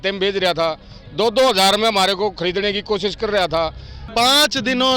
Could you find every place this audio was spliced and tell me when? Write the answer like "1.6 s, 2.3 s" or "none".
4.0 s